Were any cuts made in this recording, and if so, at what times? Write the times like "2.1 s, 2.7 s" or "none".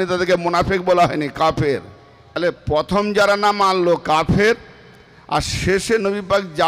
2.4 s